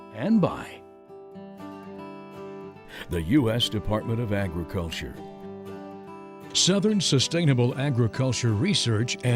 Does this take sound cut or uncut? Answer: uncut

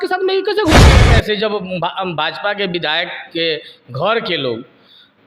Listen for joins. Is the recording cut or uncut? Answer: cut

